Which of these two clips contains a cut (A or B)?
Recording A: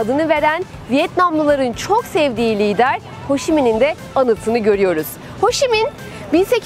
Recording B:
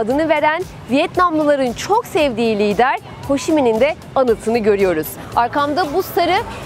B